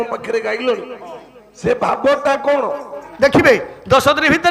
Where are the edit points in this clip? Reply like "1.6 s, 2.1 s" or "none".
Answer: 3.0 s